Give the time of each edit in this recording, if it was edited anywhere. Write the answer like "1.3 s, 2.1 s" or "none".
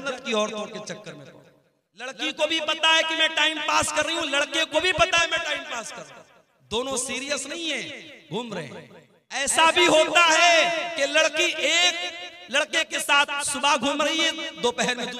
2.1 s, 9.4 s